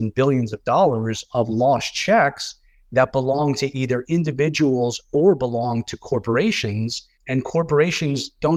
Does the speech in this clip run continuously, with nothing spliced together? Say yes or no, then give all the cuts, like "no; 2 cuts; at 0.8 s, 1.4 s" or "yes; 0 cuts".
yes; 0 cuts